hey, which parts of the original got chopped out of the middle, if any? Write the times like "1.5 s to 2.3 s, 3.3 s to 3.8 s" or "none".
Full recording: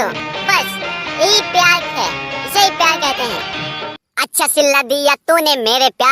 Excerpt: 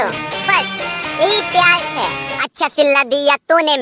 2.3 s to 4.0 s